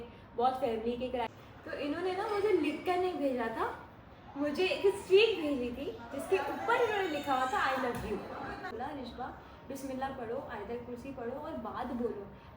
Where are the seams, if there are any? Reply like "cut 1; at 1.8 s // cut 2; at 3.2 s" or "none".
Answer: cut 1; at 1.3 s // cut 2; at 8.7 s